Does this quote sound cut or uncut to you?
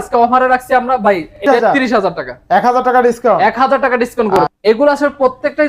cut